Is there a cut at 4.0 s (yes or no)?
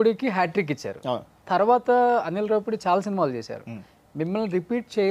no